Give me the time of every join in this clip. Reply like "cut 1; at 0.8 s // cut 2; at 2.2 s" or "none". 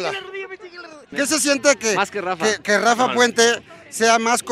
cut 1; at 1.2 s

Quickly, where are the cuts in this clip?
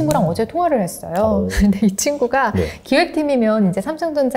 none

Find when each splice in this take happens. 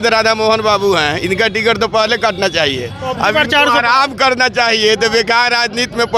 none

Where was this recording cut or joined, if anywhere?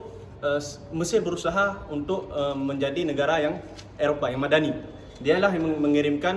none

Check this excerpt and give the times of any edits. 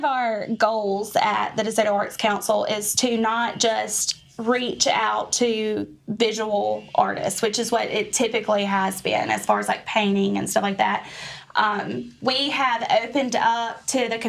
none

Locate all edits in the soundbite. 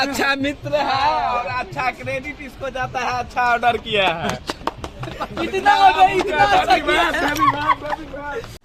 none

